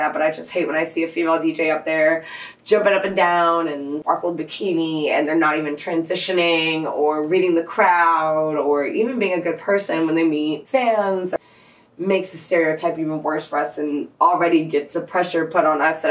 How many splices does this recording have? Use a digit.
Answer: 3